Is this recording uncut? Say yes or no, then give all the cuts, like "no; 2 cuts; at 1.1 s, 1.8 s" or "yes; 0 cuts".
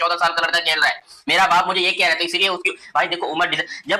yes; 0 cuts